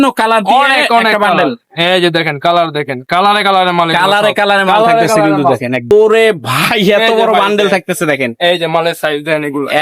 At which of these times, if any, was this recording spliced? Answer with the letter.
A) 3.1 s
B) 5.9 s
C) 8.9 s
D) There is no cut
B